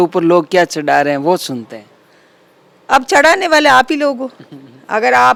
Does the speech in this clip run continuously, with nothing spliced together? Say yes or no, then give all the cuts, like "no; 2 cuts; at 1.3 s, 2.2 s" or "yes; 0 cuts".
yes; 0 cuts